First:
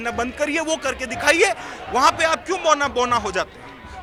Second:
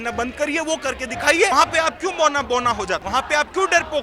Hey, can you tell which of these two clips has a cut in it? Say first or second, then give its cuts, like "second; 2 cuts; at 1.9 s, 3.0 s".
second; 2 cuts; at 1.5 s, 3.0 s